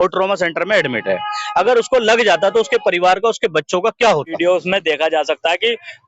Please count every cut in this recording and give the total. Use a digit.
1